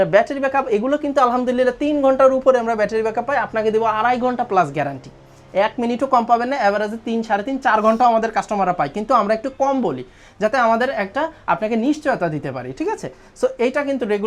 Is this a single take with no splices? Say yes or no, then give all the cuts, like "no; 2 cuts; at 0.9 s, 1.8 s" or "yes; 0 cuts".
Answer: yes; 0 cuts